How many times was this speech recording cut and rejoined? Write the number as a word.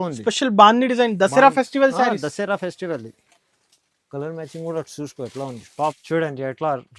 one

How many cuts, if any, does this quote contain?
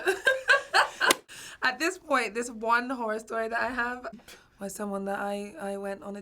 two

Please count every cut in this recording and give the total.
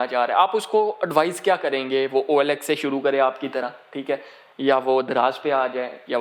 zero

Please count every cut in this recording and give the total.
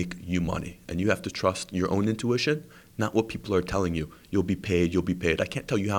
zero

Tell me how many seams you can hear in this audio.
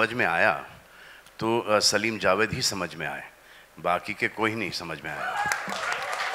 zero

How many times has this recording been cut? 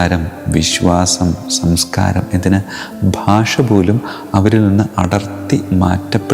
zero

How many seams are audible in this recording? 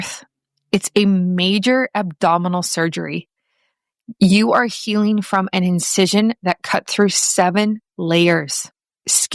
zero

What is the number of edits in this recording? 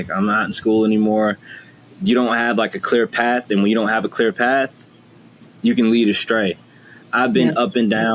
zero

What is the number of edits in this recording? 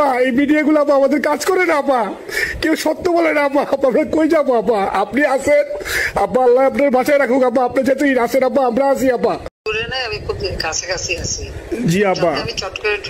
two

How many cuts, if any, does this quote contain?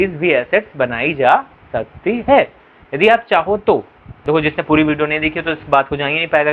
one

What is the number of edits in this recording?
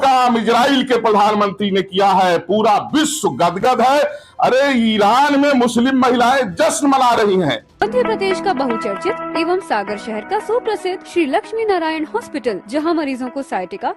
one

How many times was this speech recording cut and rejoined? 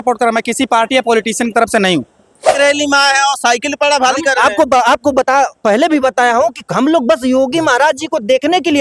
one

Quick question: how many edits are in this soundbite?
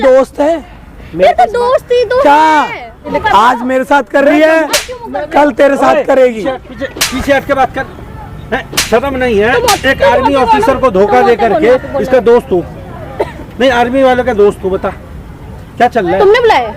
one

